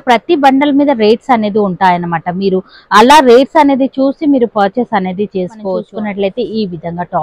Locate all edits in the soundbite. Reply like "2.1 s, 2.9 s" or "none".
5.8 s